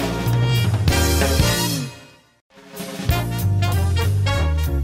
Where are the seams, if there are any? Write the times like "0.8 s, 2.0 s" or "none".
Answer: 2.6 s